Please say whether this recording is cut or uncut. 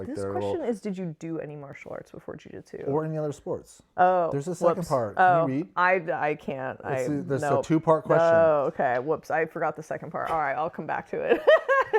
uncut